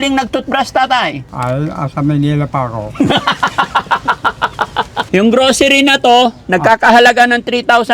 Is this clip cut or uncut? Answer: cut